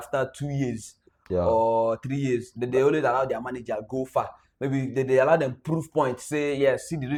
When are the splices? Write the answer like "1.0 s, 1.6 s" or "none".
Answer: none